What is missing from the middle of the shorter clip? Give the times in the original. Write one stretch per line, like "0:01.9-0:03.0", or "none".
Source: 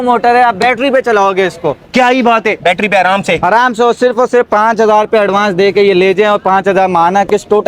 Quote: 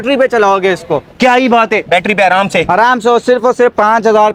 none